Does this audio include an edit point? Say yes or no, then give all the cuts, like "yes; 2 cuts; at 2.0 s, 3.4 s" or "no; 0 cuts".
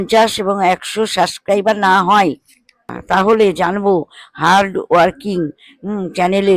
no; 0 cuts